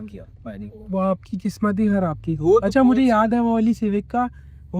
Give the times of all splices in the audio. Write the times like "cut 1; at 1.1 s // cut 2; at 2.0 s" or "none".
none